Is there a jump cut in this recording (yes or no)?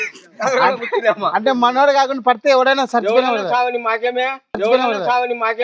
no